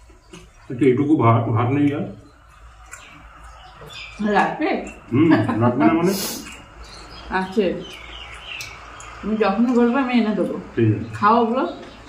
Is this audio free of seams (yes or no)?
yes